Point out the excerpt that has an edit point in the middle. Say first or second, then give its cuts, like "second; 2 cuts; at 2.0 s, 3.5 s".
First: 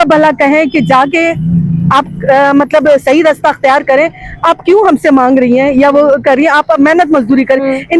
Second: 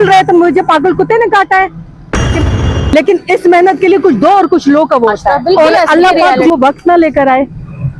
second; 2 cuts; at 2.4 s, 5.4 s